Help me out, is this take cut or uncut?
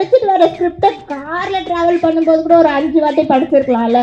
uncut